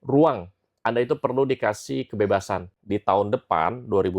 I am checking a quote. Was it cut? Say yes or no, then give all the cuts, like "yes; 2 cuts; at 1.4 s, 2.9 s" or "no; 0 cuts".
yes; 1 cut; at 2.7 s